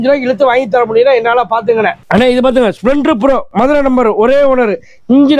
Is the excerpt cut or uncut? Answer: cut